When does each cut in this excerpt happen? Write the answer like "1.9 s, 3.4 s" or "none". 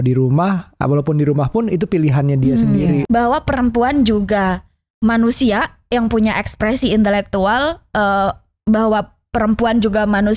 3.0 s